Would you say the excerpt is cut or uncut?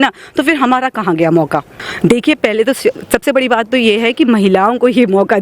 cut